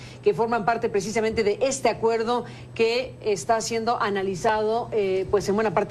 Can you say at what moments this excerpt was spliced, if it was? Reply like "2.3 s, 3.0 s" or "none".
2.2 s